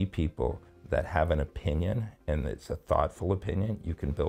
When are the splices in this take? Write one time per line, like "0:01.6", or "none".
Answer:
none